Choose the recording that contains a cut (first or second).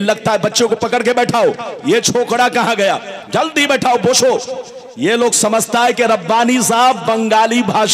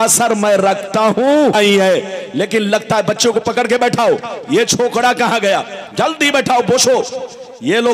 second